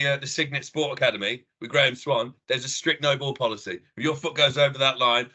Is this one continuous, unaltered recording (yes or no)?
yes